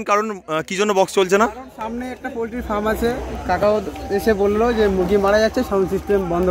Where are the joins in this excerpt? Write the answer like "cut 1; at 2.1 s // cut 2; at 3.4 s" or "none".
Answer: none